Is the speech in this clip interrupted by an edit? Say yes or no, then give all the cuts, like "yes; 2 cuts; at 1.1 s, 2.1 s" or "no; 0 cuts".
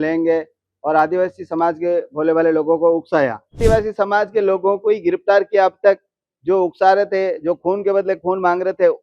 yes; 1 cut; at 3.6 s